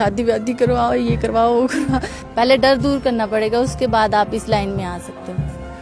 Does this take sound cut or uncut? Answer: cut